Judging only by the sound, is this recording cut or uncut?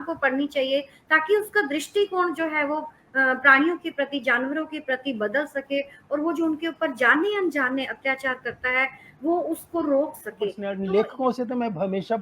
cut